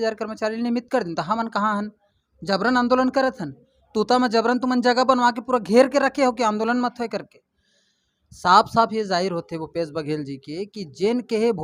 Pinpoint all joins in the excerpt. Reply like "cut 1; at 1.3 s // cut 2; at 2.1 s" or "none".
none